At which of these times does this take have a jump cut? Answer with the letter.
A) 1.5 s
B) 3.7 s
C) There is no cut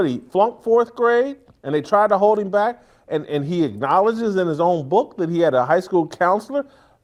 C